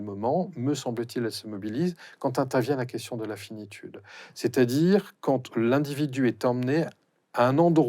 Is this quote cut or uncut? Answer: cut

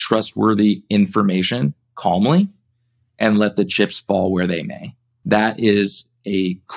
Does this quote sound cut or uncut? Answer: uncut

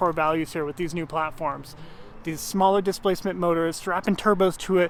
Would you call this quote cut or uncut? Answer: uncut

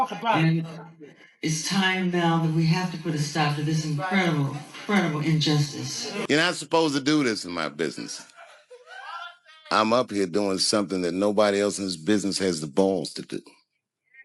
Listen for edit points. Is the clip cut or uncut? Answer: cut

